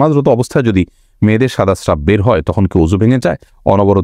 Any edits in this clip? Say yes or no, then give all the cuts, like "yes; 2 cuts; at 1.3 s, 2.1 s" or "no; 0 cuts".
no; 0 cuts